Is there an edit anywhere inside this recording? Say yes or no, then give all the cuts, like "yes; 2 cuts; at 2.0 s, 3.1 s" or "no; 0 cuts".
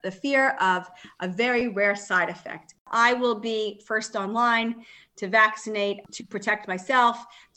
yes; 2 cuts; at 2.8 s, 6.0 s